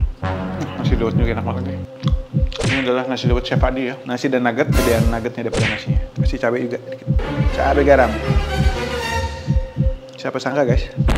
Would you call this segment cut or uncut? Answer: cut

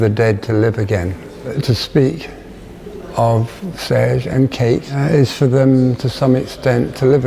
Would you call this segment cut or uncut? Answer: cut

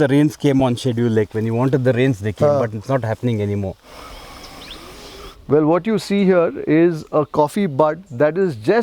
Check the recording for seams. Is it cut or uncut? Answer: cut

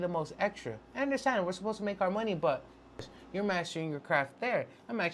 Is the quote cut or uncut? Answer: cut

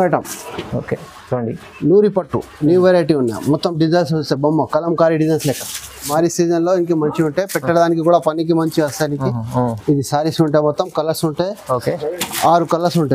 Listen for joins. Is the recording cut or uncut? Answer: cut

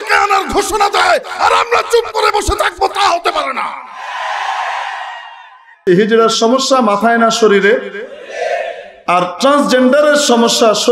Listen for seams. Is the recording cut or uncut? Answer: cut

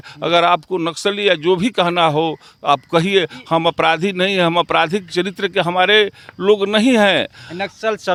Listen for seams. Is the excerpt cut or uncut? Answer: uncut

